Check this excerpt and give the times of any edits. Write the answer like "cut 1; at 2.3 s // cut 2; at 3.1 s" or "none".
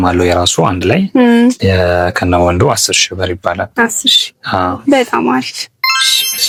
none